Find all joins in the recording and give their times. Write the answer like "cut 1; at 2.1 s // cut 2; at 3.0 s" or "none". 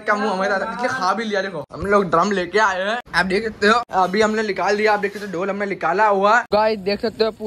cut 1; at 1.7 s // cut 2; at 3.9 s // cut 3; at 6.5 s